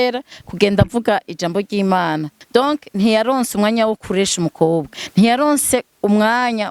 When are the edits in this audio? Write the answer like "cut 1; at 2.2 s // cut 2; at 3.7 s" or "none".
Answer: cut 1; at 2.3 s // cut 2; at 4.9 s

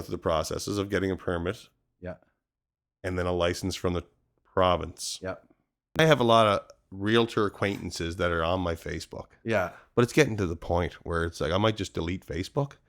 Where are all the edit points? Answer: cut 1; at 6.0 s

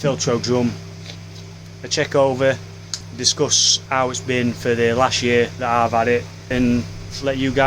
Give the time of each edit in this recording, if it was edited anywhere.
cut 1; at 3.0 s // cut 2; at 6.5 s

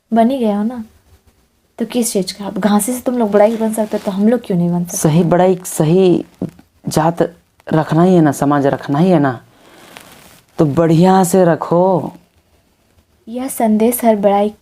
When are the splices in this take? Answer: cut 1; at 13.4 s

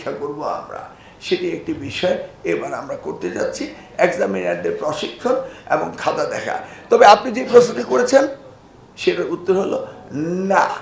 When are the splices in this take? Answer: none

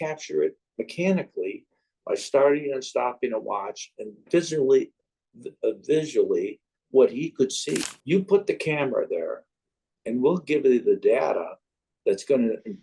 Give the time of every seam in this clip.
cut 1; at 7.9 s

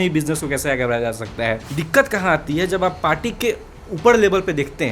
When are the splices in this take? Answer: cut 1; at 1.7 s

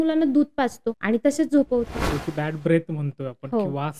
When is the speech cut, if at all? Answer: cut 1; at 1.0 s // cut 2; at 2.1 s

